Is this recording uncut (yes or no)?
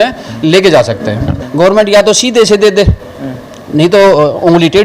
no